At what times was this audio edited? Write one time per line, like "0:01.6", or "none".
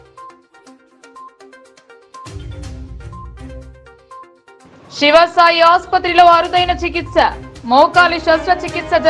0:01.7